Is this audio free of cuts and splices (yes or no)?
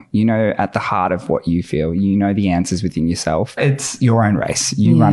no